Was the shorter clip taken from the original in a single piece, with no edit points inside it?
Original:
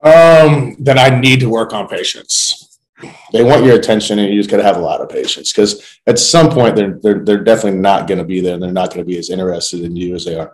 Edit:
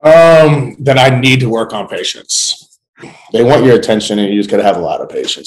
yes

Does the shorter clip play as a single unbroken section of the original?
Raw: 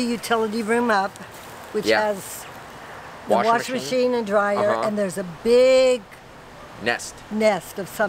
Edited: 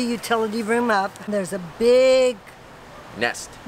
no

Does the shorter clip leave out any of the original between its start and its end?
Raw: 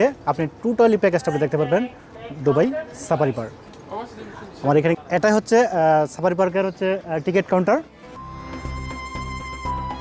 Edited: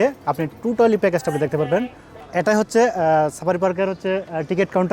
yes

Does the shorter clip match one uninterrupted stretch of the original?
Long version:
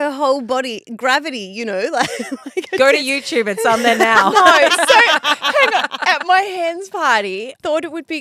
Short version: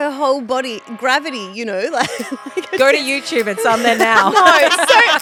yes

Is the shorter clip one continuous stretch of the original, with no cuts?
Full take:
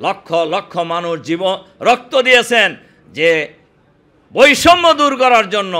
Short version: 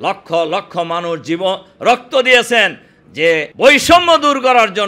no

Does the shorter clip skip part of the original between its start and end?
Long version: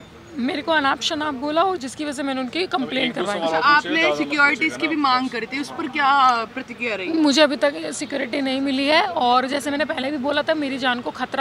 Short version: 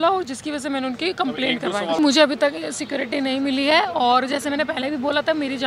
yes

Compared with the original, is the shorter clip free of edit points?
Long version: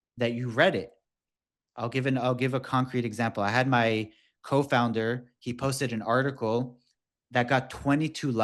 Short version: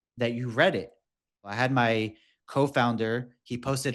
no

